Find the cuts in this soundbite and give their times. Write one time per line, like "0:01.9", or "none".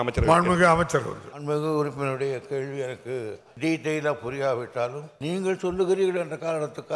0:01.3
0:03.4
0:05.1